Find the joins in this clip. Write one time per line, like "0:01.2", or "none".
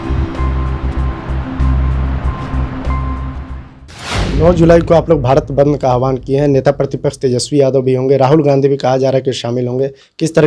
0:03.8